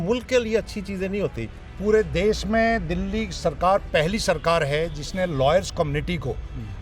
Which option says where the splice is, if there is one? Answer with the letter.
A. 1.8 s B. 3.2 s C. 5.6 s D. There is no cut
A